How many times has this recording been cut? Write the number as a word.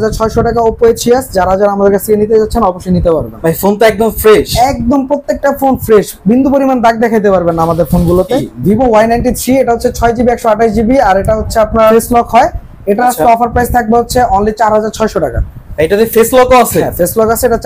two